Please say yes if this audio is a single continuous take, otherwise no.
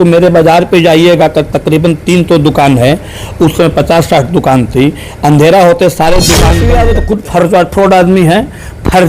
no